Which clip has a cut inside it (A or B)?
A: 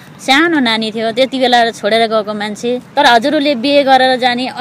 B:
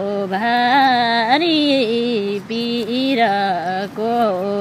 A